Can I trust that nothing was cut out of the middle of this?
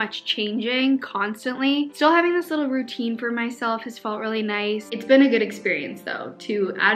no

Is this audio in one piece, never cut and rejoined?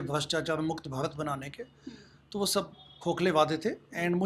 yes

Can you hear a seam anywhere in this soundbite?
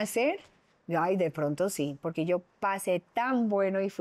no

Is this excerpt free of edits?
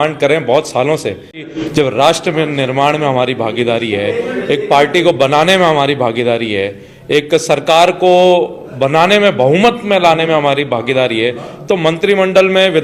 no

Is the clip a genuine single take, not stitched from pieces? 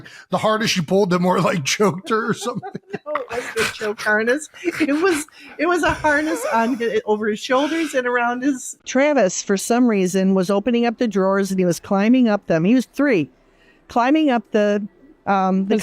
no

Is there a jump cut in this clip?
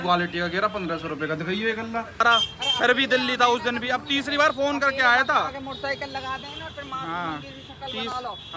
yes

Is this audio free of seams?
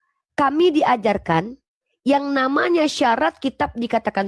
yes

